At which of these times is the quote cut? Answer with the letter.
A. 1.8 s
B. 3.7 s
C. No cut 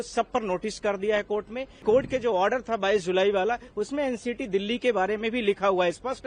A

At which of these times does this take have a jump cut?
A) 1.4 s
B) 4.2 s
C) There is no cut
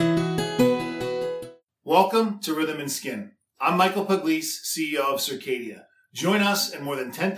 A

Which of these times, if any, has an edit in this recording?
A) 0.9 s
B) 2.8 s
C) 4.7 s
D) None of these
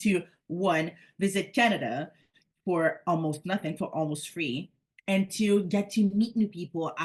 D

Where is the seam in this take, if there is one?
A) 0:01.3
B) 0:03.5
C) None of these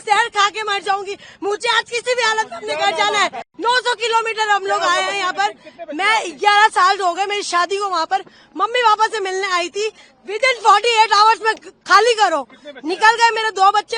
B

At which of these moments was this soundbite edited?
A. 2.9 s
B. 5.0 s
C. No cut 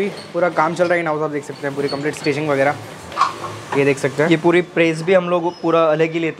C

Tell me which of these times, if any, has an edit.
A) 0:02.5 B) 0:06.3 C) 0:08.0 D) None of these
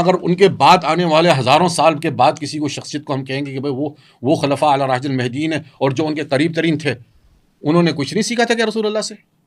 D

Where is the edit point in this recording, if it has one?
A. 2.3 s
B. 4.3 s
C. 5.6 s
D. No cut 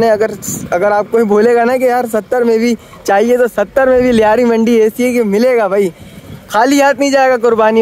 D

